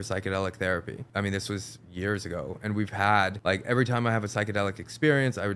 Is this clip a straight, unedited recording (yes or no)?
no